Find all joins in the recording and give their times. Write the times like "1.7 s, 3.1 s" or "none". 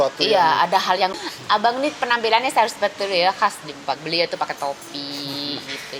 1.2 s